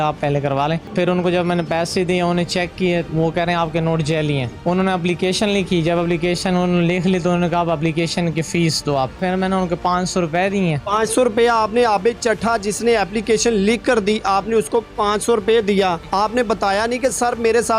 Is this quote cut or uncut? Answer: cut